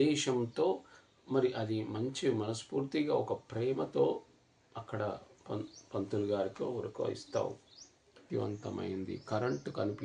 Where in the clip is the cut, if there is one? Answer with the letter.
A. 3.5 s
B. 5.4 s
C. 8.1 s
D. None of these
C